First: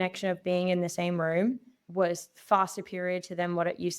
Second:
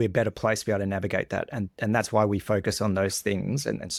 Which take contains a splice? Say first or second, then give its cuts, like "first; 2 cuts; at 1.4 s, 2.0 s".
first; 1 cut; at 1.8 s